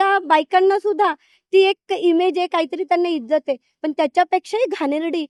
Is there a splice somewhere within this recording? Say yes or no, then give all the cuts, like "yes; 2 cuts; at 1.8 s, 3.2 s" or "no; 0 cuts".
no; 0 cuts